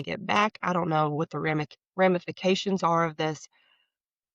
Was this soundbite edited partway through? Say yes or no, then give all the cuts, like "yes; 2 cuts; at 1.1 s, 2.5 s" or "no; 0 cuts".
no; 0 cuts